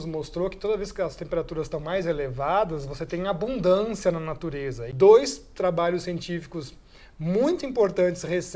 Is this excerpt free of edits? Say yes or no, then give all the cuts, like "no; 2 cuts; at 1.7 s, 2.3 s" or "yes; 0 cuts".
no; 1 cut; at 4.8 s